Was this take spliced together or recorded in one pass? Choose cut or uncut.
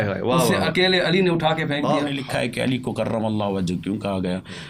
cut